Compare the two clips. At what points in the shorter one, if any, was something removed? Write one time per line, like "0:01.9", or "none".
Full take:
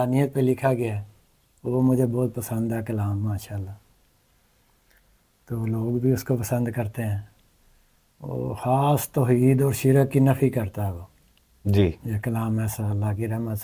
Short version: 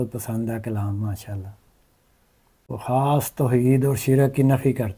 0:02.7